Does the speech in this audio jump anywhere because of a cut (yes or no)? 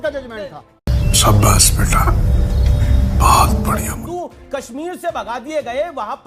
yes